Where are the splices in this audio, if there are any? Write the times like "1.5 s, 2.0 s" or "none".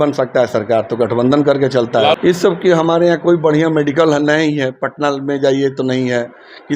2.2 s